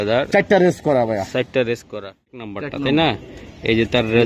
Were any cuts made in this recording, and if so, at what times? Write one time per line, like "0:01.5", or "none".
0:02.6